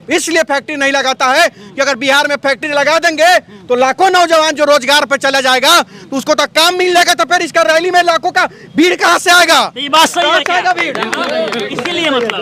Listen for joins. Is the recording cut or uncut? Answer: uncut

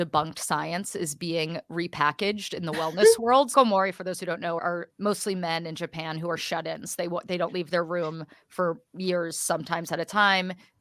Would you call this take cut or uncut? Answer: cut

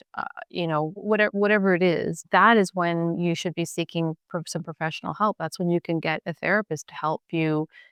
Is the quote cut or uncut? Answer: uncut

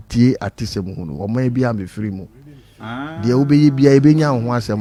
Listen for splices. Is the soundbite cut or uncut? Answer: uncut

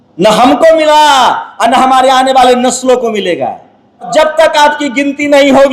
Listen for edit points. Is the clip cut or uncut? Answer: cut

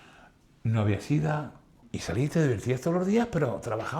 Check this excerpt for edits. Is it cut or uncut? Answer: cut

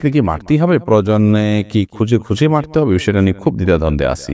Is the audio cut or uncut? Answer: uncut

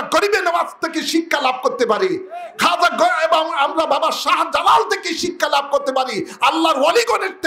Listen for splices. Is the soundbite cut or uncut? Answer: uncut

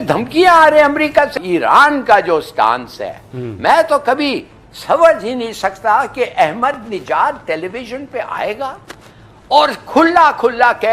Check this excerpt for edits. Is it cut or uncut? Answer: cut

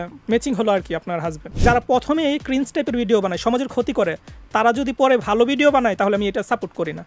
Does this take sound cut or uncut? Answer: cut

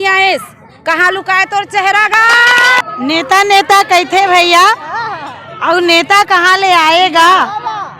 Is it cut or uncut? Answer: cut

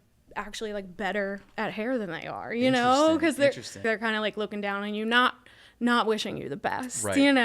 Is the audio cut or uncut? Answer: cut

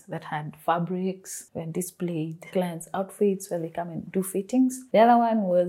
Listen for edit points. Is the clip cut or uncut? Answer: cut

